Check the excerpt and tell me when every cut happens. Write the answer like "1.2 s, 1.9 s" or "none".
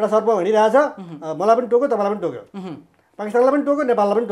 none